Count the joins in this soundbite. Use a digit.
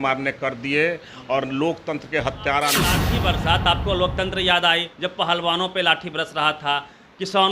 1